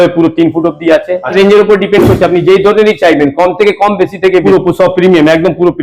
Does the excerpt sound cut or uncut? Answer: cut